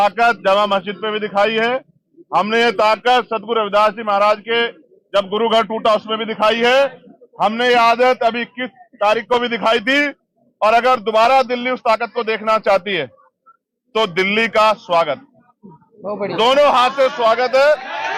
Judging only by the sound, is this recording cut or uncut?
uncut